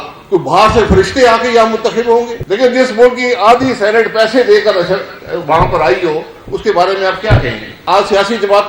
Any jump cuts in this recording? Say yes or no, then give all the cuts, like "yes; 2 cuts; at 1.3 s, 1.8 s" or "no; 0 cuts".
yes; 2 cuts; at 2.4 s, 7.7 s